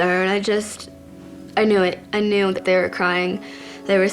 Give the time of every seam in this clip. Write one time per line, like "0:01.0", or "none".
0:02.6